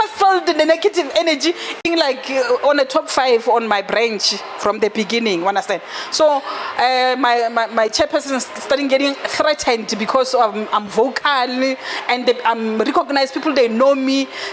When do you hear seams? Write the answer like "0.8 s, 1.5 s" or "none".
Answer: 1.8 s